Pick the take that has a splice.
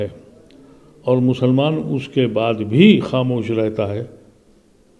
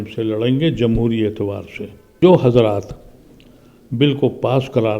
second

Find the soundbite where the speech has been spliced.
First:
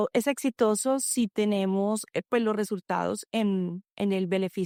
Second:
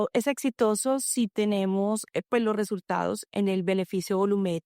second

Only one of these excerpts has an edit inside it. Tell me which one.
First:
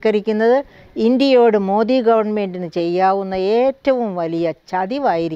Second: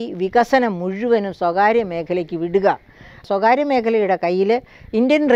second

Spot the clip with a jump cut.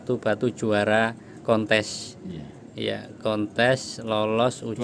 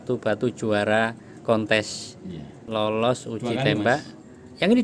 second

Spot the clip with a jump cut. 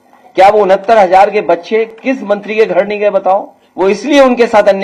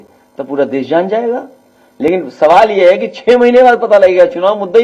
first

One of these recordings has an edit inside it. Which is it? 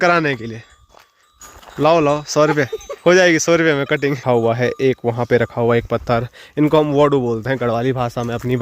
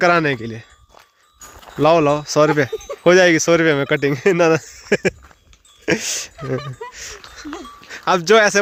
first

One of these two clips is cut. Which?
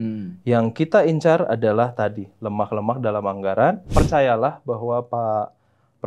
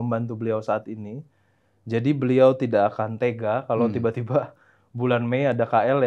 first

